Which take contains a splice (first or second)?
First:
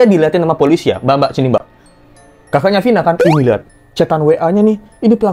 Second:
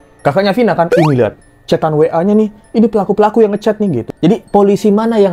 second